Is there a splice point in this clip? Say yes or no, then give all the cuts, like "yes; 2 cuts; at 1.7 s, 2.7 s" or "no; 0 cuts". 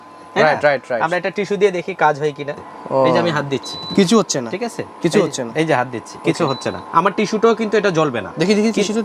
yes; 2 cuts; at 2.6 s, 6.1 s